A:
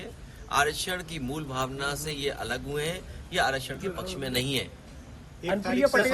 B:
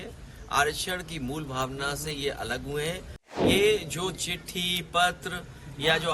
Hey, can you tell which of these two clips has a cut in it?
B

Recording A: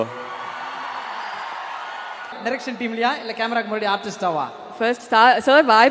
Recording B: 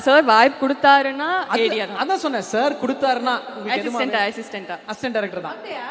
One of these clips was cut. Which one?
A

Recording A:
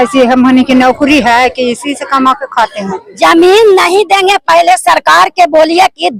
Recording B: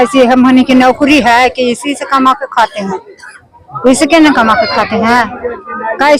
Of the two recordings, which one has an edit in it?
A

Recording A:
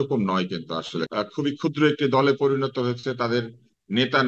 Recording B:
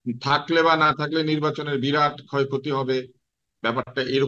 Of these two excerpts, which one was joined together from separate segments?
A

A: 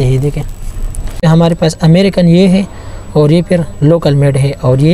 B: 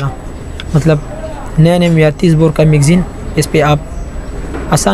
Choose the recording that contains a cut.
A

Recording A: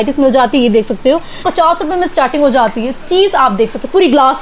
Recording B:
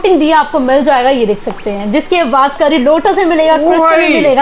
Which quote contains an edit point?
A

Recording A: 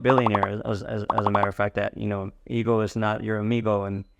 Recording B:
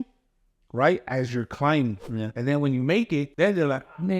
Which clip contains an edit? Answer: B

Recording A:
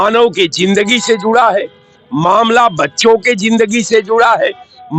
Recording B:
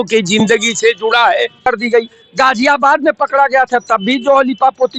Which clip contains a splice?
B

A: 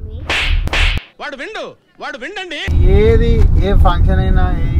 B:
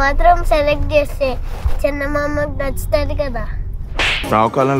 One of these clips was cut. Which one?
A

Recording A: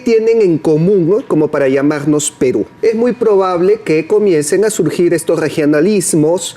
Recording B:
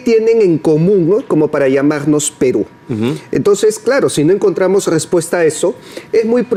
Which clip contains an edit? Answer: A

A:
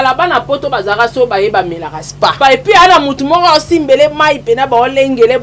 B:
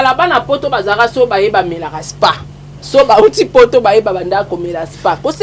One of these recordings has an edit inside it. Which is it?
A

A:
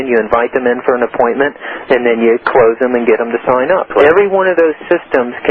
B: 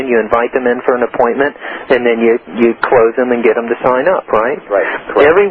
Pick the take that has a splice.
A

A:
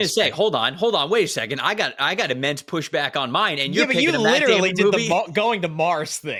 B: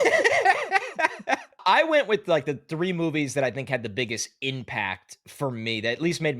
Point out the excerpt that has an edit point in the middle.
B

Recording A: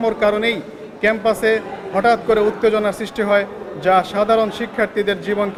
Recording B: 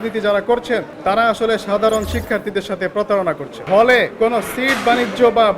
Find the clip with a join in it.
B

